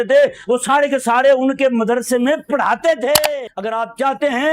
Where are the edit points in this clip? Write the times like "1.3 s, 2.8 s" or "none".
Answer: 3.4 s